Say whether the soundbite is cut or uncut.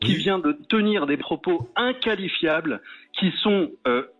uncut